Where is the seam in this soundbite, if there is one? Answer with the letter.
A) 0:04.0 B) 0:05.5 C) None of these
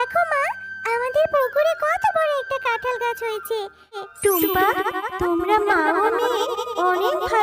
A